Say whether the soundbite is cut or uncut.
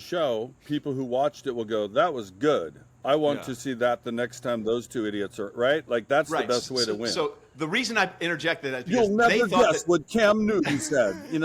uncut